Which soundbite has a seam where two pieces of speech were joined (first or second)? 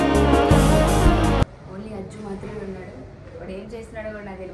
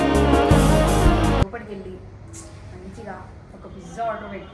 second